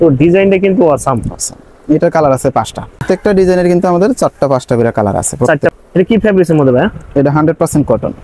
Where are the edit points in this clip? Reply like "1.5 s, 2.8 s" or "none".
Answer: 3.0 s, 5.7 s